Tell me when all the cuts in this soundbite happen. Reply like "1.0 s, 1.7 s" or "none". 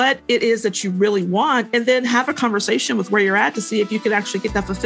none